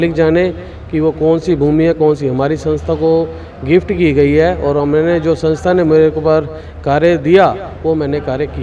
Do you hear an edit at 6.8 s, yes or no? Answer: no